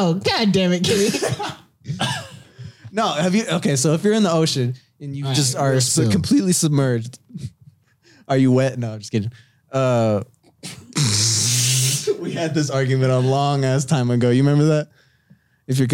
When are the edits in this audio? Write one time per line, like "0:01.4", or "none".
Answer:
none